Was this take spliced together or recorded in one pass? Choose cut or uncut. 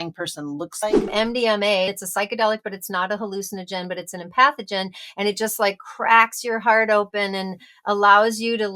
cut